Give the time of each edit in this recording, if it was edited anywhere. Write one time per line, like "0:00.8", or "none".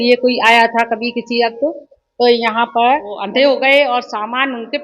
0:03.2